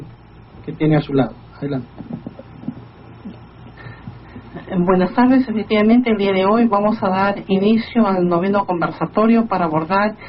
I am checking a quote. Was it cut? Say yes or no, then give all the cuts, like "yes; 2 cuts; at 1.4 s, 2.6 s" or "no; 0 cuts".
no; 0 cuts